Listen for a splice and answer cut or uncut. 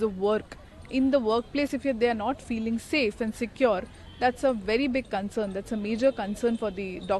uncut